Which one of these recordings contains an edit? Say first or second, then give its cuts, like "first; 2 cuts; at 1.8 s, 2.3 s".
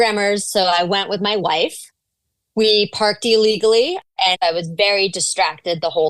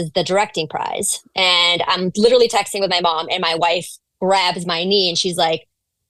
first; 1 cut; at 4.0 s